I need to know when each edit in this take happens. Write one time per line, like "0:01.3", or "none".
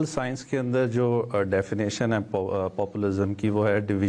none